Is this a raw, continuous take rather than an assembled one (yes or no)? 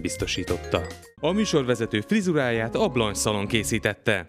no